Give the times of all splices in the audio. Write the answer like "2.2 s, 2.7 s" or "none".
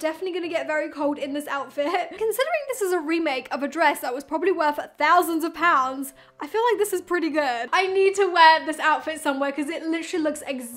2.2 s, 7.6 s